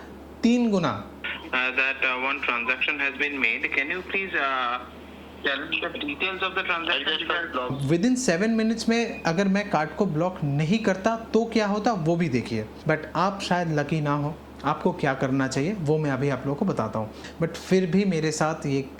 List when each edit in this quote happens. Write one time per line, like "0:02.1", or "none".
0:01.1
0:07.7
0:12.7
0:17.2